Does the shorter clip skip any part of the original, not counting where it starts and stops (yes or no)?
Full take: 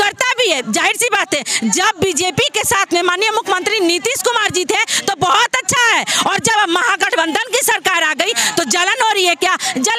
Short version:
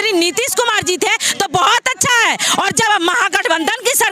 no